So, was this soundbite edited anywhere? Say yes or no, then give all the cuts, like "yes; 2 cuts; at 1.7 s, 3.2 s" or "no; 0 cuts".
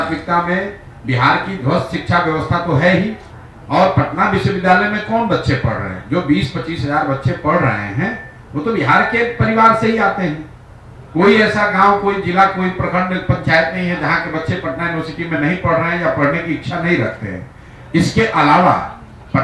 no; 0 cuts